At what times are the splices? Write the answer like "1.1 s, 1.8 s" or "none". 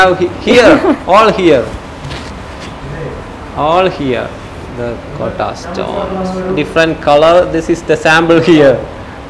none